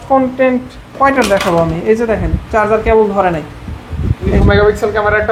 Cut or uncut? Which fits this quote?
cut